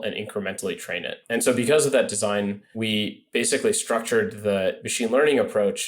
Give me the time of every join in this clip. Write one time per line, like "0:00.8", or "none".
0:01.1
0:02.7
0:04.8